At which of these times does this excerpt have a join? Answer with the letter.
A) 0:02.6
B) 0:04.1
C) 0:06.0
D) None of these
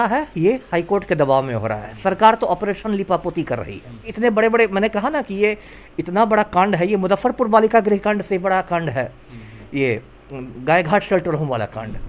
B